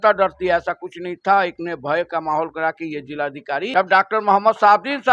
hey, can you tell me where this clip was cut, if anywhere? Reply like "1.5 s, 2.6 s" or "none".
3.7 s